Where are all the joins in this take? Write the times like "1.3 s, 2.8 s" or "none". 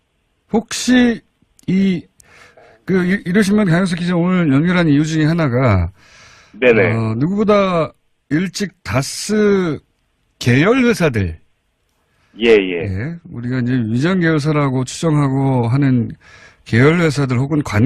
3.3 s